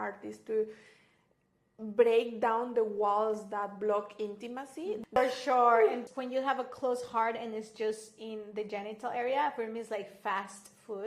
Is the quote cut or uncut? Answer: cut